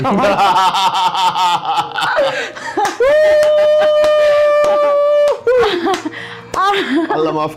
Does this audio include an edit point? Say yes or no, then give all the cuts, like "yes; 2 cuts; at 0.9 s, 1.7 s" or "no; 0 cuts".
no; 0 cuts